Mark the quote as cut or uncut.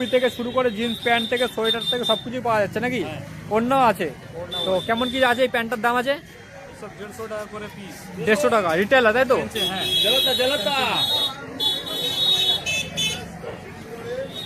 uncut